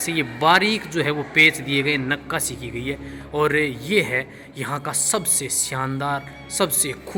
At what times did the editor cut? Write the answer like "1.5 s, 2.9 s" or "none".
none